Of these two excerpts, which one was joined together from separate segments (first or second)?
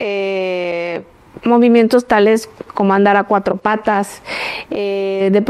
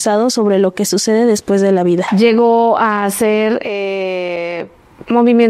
second